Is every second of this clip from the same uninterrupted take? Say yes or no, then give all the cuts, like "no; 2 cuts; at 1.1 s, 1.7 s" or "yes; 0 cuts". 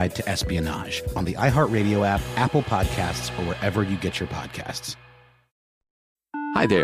no; 1 cut; at 5.4 s